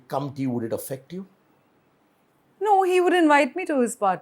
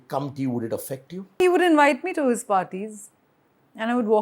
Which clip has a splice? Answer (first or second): second